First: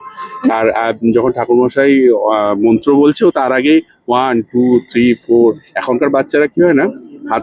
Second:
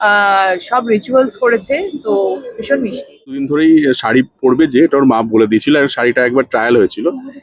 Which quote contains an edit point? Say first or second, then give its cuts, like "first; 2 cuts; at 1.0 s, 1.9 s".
second; 1 cut; at 3.4 s